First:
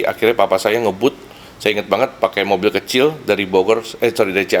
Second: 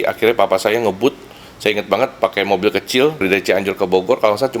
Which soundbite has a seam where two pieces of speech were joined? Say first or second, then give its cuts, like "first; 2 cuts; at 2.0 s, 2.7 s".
second; 1 cut; at 3.2 s